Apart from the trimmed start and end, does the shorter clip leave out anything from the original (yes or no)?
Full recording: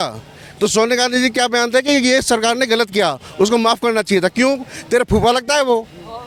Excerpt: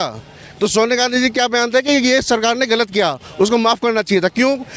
no